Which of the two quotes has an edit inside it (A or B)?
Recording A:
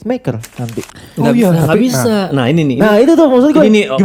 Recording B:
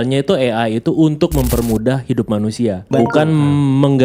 B